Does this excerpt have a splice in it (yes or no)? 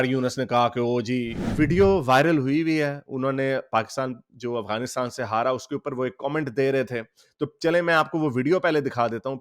yes